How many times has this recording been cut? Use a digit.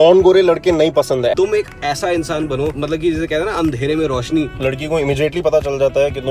3